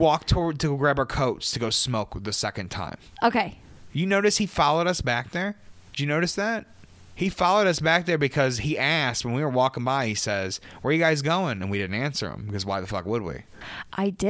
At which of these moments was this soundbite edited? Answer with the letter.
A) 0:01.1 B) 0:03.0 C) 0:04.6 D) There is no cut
D